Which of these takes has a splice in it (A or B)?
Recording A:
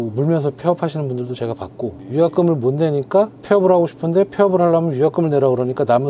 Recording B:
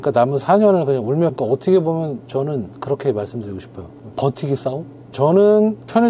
B